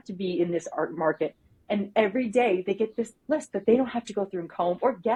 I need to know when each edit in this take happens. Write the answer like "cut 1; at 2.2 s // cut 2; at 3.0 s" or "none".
none